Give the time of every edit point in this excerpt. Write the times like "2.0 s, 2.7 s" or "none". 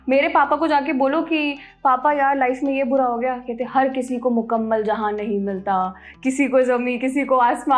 none